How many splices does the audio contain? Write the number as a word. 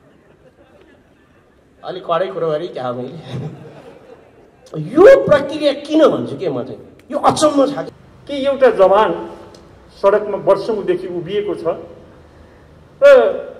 one